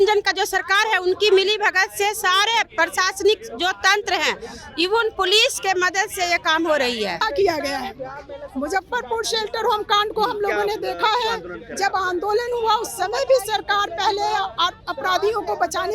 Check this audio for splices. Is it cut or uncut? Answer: cut